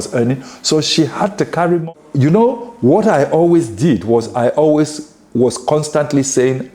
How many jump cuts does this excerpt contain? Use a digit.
1